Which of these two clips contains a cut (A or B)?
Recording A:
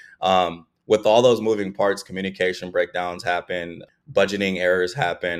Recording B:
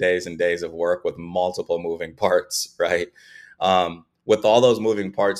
A